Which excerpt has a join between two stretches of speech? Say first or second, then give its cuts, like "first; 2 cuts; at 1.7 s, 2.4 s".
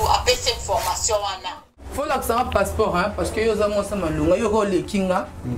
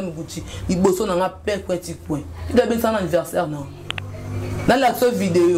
first; 1 cut; at 1.9 s